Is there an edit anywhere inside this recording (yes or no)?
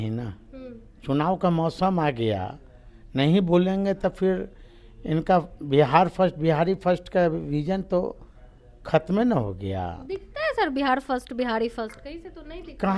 no